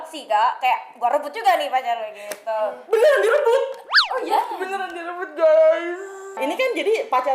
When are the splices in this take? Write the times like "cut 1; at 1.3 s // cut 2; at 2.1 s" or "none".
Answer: cut 1; at 6.4 s

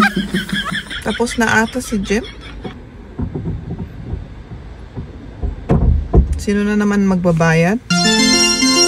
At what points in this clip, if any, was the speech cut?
cut 1; at 0.9 s // cut 2; at 7.8 s

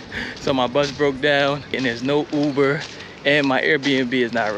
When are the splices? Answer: cut 1; at 1.8 s

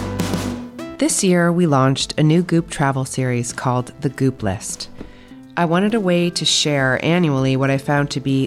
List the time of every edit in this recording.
cut 1; at 0.9 s

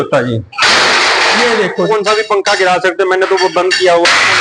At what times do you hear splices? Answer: cut 1; at 1.9 s

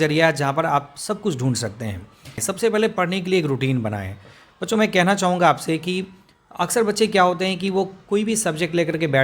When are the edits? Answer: cut 1; at 2.4 s

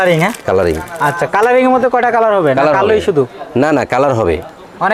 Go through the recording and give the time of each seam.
none

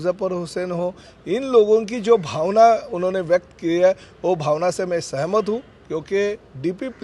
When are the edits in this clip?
none

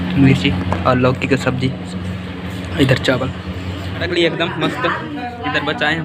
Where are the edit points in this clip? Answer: cut 1; at 4.0 s

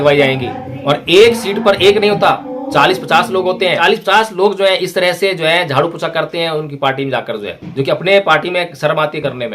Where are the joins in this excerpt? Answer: cut 1; at 3.8 s

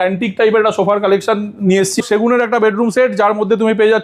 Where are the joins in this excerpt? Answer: cut 1; at 2.0 s

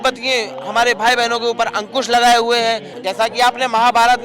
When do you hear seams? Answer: cut 1; at 2.9 s

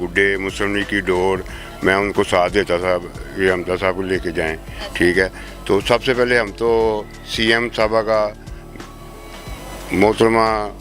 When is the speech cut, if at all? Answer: none

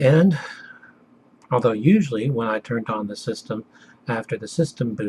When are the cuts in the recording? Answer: cut 1; at 3.1 s

